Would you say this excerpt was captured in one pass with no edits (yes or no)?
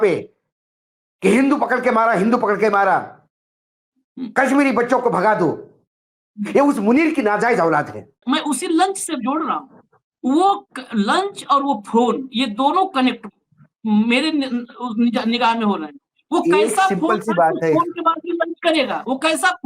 no